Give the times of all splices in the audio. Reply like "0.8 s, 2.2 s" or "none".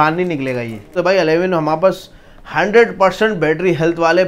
0.9 s